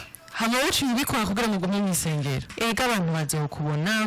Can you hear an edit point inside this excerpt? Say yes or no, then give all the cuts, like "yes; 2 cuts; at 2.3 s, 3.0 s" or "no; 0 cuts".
yes; 1 cut; at 2.5 s